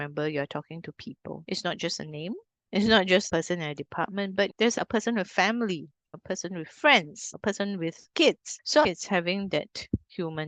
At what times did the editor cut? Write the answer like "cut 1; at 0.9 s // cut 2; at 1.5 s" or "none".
cut 1; at 1.4 s // cut 2; at 8.8 s